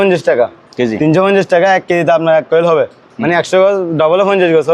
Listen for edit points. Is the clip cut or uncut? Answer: uncut